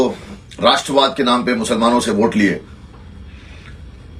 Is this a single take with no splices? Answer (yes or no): yes